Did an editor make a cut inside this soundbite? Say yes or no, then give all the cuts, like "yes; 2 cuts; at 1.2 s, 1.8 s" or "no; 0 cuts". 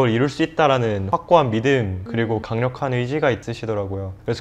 yes; 3 cuts; at 1.0 s, 2.3 s, 3.5 s